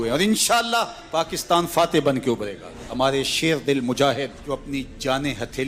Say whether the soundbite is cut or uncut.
uncut